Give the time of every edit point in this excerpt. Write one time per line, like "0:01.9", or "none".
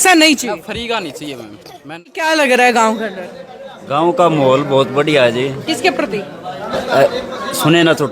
0:02.2